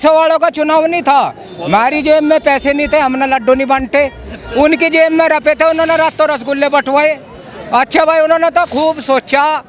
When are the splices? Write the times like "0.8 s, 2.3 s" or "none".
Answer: none

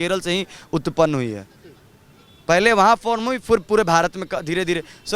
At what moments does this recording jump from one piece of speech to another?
none

